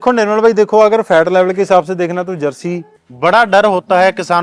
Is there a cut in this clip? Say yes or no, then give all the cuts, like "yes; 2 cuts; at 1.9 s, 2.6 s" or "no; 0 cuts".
yes; 1 cut; at 2.9 s